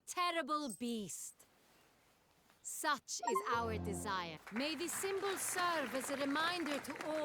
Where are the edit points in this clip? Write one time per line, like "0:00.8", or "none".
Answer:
0:04.4